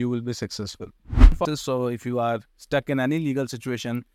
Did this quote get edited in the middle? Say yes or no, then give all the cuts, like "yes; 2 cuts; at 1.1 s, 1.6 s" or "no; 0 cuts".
yes; 1 cut; at 1.4 s